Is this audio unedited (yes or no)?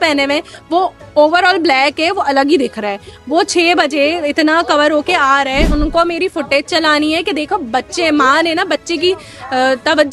no